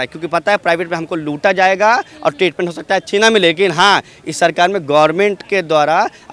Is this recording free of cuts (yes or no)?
yes